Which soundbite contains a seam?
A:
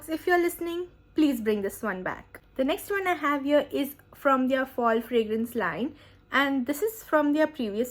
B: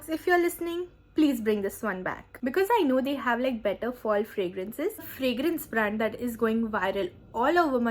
B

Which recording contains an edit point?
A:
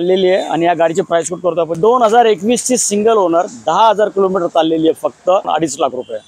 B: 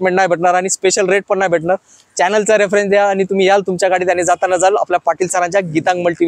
A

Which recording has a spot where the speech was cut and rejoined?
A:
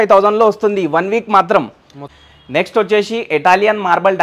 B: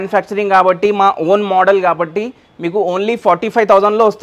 A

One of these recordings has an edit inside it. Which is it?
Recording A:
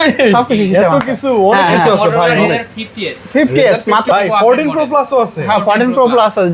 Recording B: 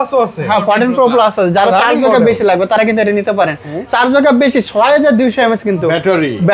A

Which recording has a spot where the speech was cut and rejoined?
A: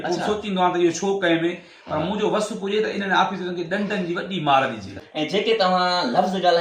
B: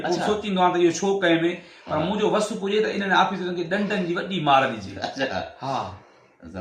A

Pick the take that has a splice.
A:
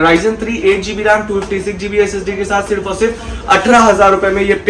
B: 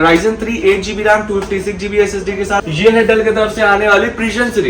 B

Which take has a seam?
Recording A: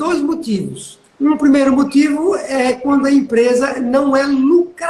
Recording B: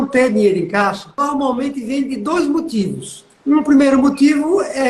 B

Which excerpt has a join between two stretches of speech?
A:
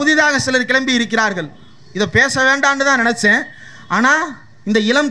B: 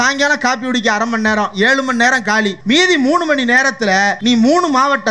B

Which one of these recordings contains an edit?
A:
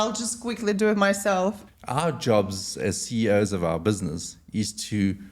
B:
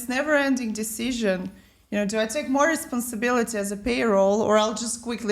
A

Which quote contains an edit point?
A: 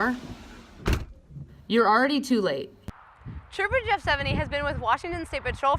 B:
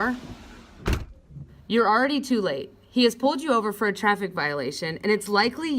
A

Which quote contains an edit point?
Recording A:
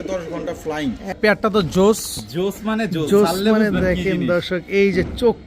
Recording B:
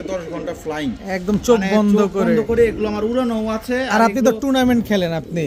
A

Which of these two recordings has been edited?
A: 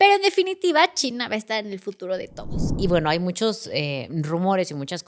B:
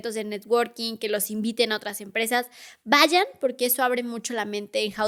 A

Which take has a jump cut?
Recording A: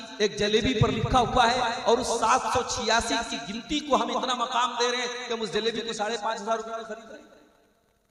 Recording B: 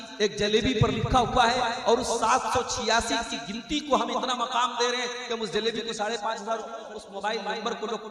B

